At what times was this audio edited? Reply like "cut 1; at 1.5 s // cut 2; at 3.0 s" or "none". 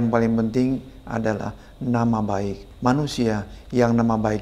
cut 1; at 2.6 s